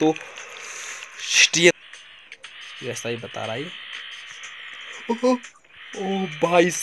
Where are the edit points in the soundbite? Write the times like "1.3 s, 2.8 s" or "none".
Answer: 1.7 s